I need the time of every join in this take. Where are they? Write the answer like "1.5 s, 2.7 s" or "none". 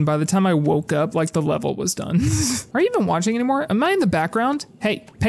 2.6 s